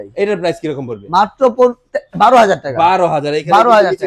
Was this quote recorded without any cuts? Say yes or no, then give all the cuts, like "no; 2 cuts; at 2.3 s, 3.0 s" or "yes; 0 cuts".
yes; 0 cuts